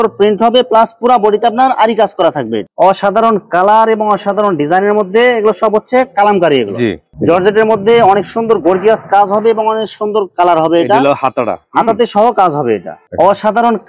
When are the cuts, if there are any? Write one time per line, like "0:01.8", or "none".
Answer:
0:02.6
0:07.0
0:13.0